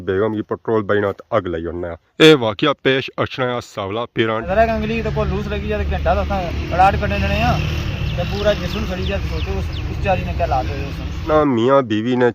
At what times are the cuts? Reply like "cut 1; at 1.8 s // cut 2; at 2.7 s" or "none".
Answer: cut 1; at 2.0 s // cut 2; at 4.5 s // cut 3; at 11.2 s